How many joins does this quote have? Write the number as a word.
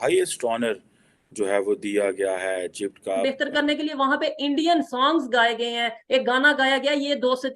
one